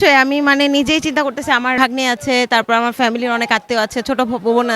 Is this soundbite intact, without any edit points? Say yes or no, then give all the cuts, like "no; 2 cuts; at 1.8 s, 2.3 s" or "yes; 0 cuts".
no; 1 cut; at 1.8 s